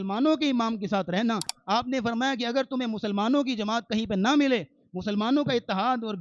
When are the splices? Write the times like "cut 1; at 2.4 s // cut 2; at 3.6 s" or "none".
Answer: cut 1; at 1.5 s

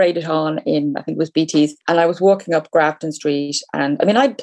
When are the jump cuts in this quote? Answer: cut 1; at 1.8 s

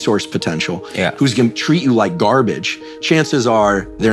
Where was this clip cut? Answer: none

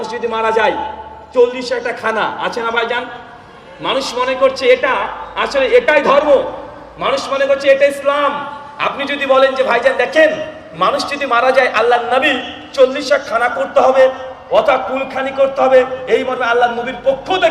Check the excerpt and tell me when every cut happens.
none

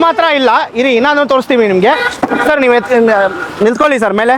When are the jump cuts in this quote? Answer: none

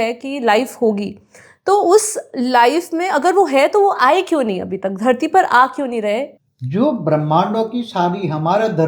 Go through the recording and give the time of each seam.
cut 1; at 6.3 s

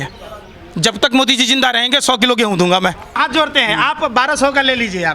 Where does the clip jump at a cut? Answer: cut 1; at 3.2 s

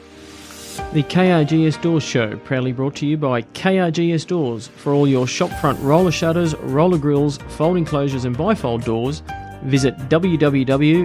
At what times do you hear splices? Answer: cut 1; at 0.9 s

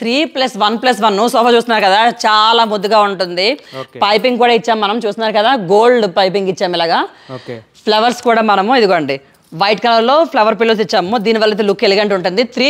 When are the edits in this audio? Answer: none

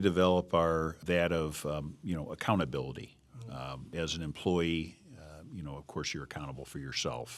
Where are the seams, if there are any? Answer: cut 1; at 1.0 s // cut 2; at 3.9 s

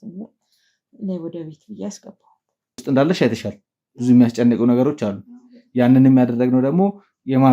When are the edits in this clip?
cut 1; at 2.8 s

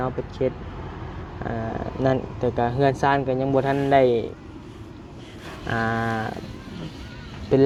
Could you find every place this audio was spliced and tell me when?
none

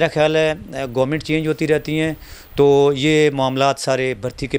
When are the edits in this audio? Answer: none

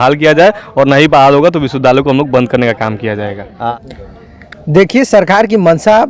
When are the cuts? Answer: cut 1; at 3.7 s

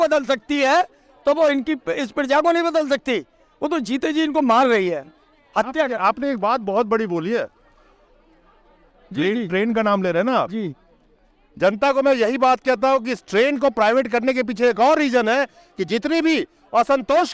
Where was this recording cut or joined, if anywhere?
none

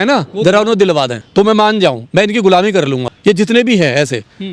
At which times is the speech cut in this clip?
cut 1; at 1.2 s // cut 2; at 3.1 s

